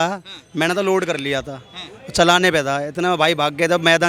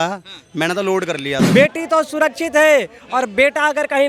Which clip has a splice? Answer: second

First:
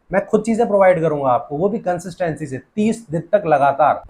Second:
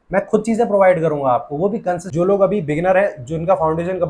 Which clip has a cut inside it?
second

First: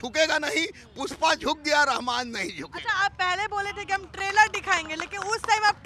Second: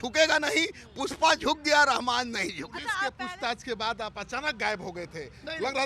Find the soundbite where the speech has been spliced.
second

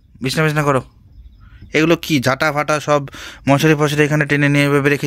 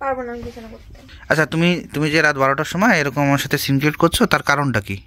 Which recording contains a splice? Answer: second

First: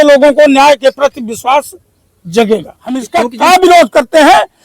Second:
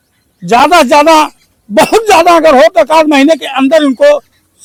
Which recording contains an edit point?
first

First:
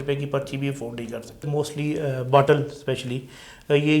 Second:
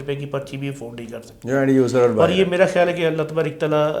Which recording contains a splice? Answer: first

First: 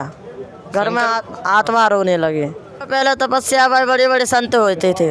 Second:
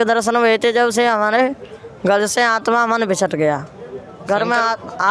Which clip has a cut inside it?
first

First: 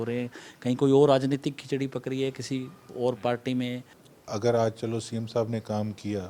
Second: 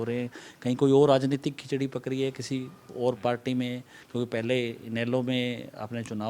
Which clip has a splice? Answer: first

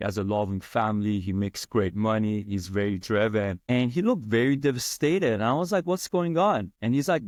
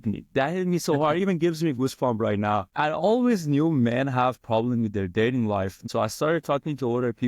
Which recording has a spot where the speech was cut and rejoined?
second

